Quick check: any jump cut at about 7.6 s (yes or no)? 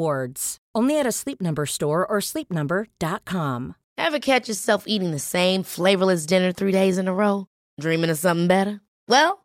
no